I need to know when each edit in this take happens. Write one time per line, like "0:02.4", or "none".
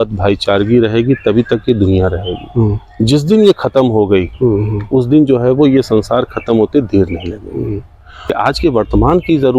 0:08.3